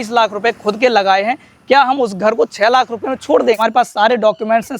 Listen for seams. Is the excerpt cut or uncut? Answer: cut